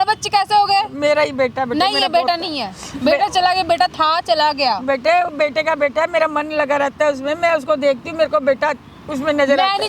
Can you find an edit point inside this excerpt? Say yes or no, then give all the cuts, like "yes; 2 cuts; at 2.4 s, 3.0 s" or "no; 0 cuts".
no; 0 cuts